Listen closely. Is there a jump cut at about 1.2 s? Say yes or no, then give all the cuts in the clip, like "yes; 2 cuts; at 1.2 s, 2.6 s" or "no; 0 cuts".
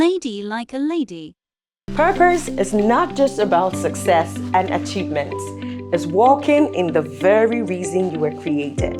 yes; 1 cut; at 1.2 s